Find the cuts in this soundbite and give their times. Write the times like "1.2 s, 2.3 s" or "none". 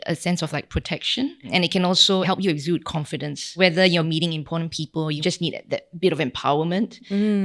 1.4 s, 3.4 s, 4.0 s